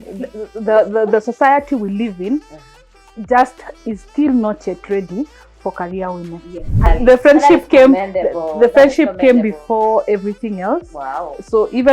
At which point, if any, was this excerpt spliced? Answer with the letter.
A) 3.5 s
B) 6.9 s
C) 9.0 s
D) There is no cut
B